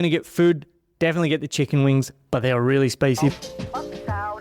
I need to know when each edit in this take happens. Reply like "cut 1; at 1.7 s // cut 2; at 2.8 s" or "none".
cut 1; at 3.3 s